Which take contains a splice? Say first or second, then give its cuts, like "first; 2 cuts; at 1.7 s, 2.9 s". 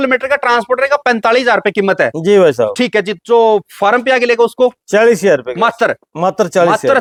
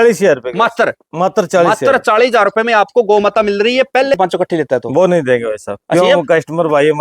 second; 1 cut; at 4.1 s